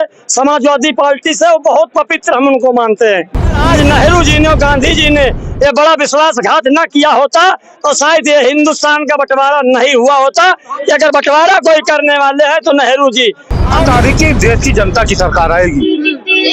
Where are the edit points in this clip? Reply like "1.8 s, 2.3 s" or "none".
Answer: 3.6 s, 13.8 s

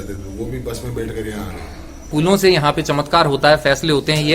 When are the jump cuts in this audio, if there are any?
2.1 s

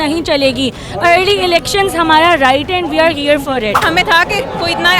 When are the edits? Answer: 3.8 s

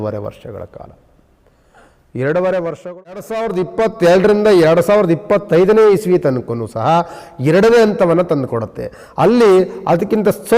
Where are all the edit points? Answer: 3.2 s

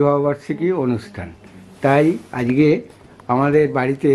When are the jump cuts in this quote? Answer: none

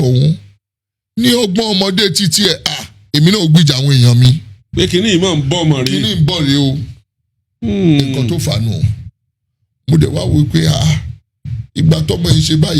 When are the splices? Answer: none

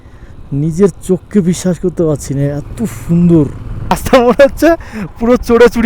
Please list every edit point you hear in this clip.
4.0 s

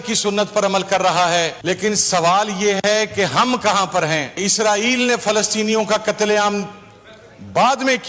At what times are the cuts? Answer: 1.6 s, 4.4 s

